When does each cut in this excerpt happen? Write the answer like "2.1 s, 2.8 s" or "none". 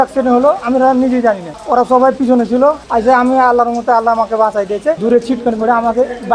1.5 s, 2.8 s, 5.0 s